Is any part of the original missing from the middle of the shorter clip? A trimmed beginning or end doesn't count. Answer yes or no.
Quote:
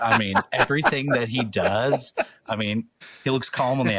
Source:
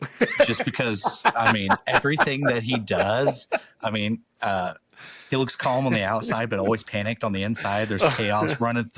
yes